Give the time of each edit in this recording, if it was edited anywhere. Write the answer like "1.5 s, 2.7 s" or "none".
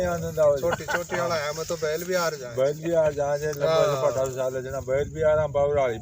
none